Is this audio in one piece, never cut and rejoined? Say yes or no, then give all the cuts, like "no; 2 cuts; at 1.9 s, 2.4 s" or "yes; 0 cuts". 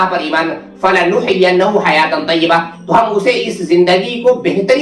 yes; 0 cuts